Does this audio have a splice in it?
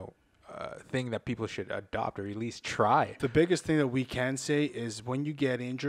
yes; 1 cut; at 3.1 s

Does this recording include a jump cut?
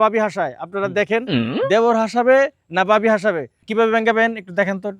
yes; 1 cut; at 3.6 s

